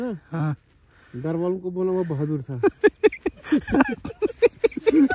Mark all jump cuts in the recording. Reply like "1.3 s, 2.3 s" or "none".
none